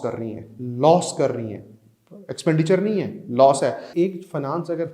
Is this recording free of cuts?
no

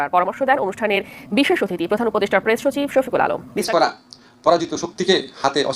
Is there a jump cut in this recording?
yes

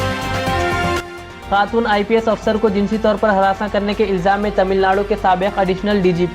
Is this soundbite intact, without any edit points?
no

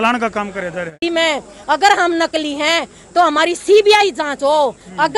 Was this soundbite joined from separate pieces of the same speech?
yes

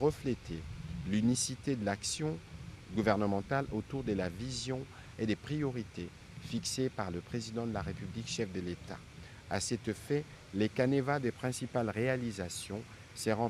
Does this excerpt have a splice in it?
yes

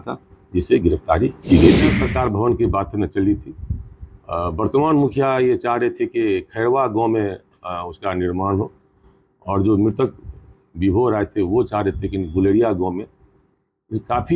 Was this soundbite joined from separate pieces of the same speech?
yes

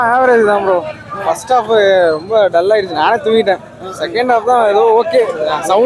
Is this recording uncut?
yes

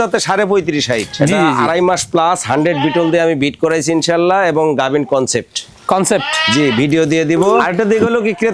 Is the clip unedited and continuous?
no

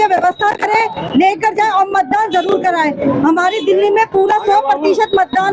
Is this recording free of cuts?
yes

